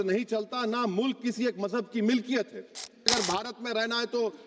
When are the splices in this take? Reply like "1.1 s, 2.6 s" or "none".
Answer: 3.1 s